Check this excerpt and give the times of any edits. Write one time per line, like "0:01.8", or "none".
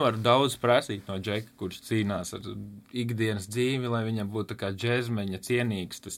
none